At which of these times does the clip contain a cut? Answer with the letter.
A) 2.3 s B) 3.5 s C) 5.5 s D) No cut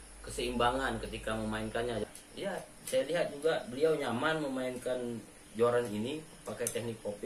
A